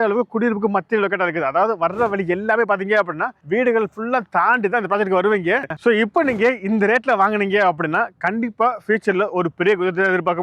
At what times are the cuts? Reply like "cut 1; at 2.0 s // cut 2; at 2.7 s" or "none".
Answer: cut 1; at 5.7 s